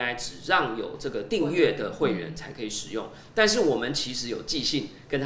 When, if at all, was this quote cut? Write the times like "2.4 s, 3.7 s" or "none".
none

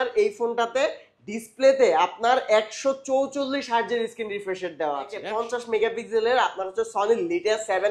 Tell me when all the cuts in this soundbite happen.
5.2 s

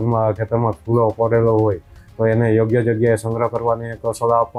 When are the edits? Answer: none

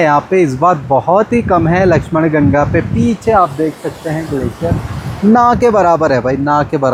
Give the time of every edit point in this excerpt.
none

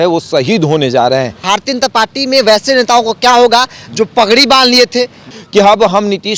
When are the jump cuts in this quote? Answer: 1.4 s, 5.2 s

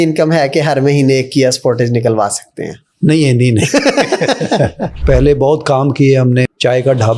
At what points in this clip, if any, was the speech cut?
5.0 s, 6.5 s

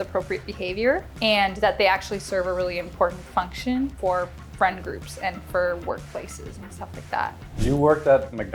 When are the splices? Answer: 1.1 s, 4.0 s, 7.5 s

